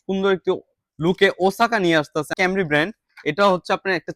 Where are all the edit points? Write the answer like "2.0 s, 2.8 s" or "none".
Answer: 2.3 s